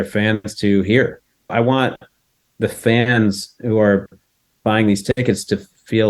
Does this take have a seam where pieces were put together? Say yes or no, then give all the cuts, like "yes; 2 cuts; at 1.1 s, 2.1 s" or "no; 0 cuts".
yes; 1 cut; at 1.5 s